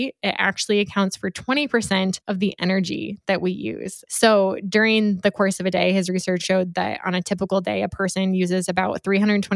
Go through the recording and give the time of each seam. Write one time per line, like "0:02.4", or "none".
0:03.9
0:06.4